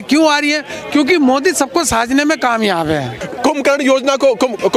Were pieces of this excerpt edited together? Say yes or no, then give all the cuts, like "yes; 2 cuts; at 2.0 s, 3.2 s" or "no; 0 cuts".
yes; 1 cut; at 3.3 s